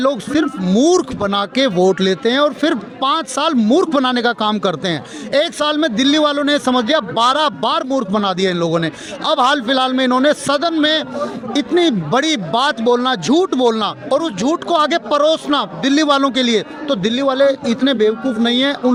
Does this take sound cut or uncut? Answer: uncut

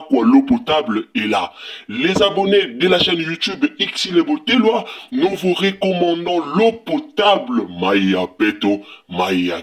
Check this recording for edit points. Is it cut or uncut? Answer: uncut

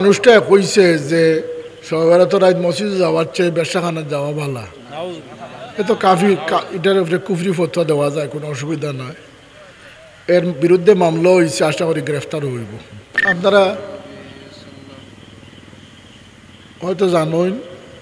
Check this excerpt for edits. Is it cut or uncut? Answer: cut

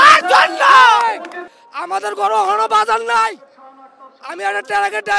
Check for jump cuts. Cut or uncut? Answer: cut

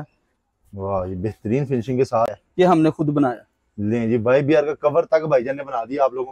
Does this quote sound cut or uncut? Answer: cut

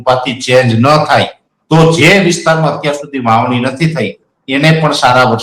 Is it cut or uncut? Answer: uncut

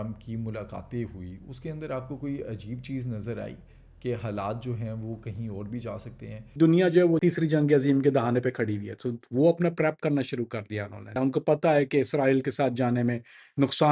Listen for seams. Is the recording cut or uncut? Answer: cut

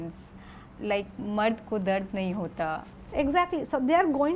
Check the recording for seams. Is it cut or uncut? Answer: cut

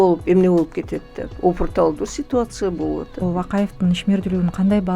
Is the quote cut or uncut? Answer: cut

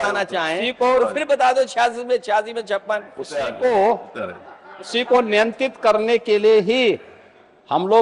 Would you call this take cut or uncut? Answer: uncut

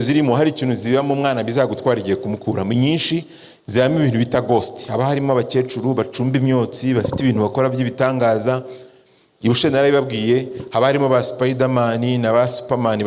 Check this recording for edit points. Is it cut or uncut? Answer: uncut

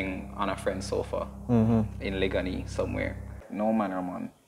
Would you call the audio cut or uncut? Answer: cut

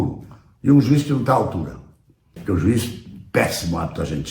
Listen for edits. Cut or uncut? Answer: cut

